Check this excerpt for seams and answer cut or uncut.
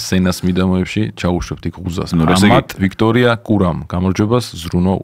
cut